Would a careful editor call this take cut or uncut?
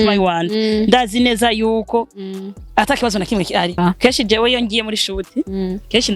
cut